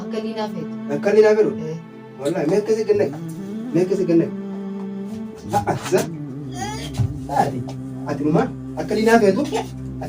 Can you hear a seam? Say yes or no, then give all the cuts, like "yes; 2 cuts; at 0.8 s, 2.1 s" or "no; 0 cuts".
no; 0 cuts